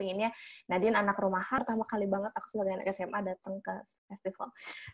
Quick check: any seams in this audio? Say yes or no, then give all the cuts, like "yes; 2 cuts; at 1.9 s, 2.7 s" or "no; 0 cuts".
yes; 1 cut; at 1.6 s